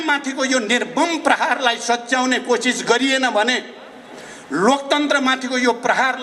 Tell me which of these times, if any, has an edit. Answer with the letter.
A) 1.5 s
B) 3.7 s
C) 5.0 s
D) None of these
D